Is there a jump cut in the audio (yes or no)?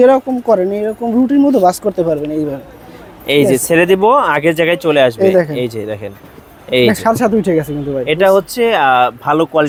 no